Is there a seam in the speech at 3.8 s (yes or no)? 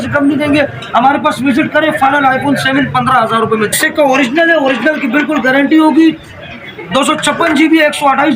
yes